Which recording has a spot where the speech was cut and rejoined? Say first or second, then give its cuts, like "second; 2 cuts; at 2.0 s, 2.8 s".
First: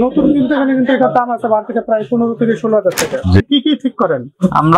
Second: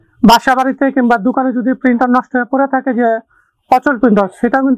first; 1 cut; at 3.4 s